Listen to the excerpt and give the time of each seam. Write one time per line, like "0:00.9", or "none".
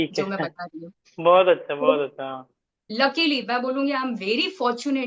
0:02.9